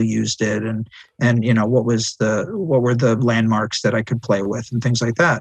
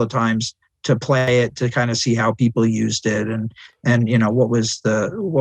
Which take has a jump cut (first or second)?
second